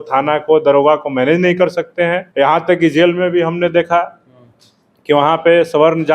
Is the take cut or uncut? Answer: cut